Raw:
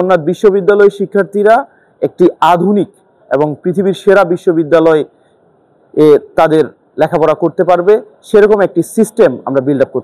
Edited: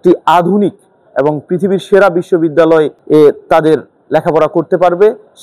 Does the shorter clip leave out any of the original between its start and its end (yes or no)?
yes